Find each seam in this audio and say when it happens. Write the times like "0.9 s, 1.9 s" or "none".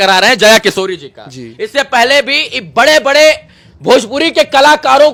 none